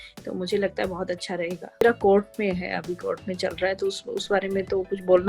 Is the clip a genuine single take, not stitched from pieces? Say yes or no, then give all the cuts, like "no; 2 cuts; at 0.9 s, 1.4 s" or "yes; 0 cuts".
no; 1 cut; at 1.8 s